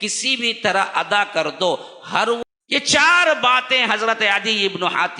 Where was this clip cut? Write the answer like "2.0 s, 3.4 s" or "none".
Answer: 2.4 s